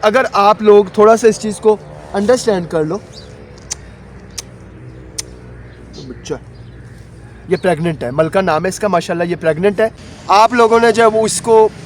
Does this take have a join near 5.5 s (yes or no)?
no